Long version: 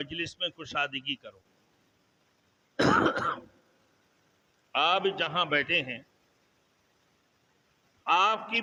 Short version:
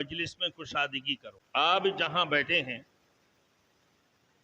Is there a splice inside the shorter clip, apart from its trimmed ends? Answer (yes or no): yes